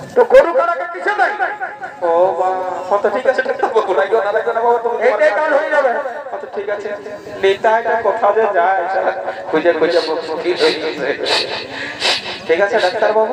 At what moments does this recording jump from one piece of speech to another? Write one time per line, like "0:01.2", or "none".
none